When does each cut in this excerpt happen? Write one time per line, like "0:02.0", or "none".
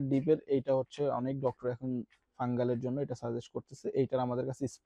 none